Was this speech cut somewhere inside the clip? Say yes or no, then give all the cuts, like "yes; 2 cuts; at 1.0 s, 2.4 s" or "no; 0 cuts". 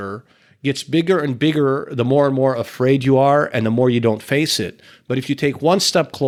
no; 0 cuts